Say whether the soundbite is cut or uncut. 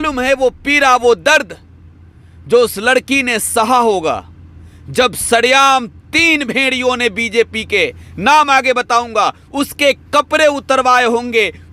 uncut